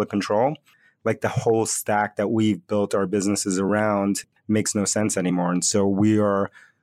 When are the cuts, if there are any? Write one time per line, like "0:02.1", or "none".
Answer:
0:04.3